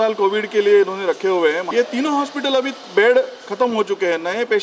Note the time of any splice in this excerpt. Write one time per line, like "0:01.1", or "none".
0:01.6